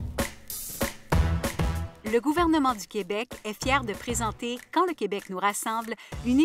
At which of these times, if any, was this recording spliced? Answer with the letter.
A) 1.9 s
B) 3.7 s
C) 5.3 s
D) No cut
A